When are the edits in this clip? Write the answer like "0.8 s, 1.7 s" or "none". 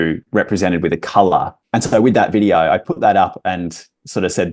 1.6 s